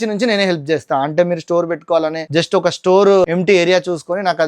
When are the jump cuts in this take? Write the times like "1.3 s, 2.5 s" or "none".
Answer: 2.2 s, 3.2 s